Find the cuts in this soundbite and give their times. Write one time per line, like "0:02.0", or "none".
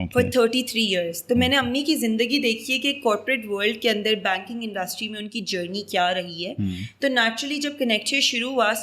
none